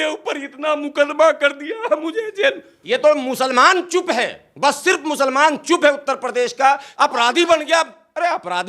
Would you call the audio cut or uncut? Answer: cut